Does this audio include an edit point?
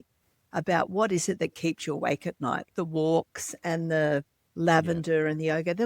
yes; 1 cut; at 2.7 s

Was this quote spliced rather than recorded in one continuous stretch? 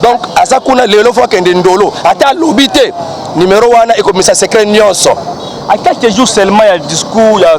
no; 0 cuts

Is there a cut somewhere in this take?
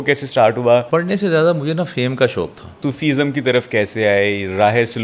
yes; 2 cuts; at 0.9 s, 2.8 s

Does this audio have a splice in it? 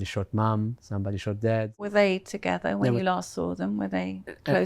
yes; 1 cut; at 1.9 s

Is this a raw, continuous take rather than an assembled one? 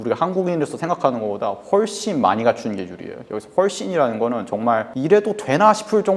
yes; 0 cuts

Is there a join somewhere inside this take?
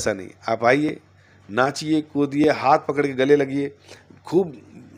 no; 0 cuts

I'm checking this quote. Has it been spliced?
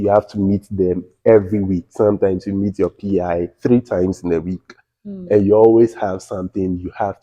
no; 0 cuts

